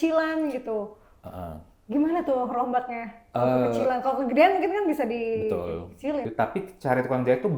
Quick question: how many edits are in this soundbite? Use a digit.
1